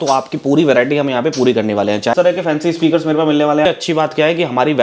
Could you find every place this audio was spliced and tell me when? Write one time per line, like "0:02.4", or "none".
0:02.1
0:03.6